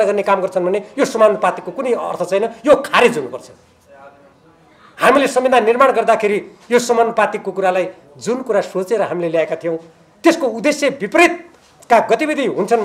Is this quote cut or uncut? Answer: uncut